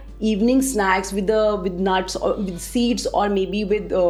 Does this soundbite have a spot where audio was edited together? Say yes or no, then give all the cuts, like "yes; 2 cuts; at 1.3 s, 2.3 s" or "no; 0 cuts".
no; 0 cuts